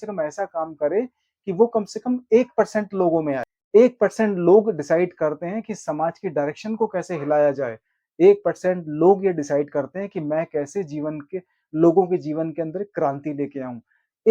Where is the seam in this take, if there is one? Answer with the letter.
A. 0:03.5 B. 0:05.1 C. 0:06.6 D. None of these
A